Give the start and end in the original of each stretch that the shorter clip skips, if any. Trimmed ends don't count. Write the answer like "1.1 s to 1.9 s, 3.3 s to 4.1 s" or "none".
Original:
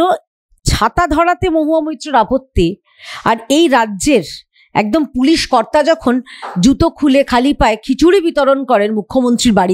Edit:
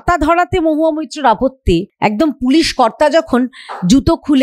2.8 s to 4.6 s